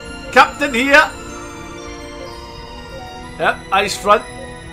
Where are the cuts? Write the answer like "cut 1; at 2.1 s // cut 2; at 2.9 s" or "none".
none